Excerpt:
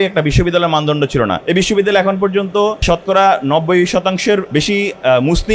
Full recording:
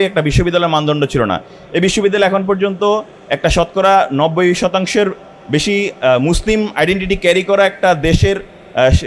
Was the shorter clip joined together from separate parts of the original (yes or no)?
yes